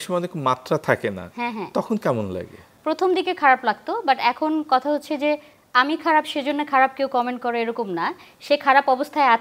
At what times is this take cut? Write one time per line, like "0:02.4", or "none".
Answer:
none